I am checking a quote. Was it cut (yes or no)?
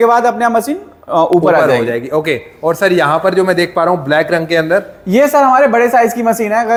no